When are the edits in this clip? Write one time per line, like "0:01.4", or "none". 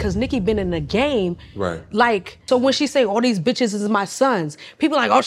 0:02.4